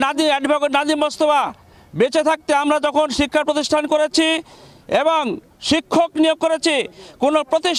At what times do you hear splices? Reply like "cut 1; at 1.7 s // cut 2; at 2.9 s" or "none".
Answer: none